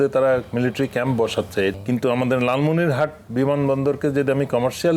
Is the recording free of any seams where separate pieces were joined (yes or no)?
no